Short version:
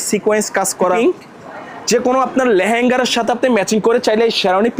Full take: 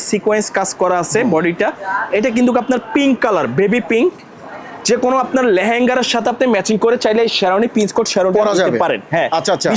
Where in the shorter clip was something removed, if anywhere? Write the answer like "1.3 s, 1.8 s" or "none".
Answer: 1.0 s